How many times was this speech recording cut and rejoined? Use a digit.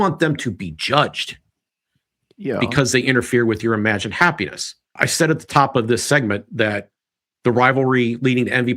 0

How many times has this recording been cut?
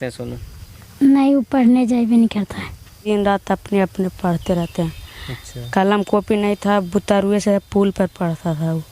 1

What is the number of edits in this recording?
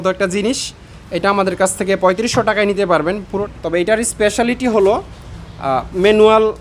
1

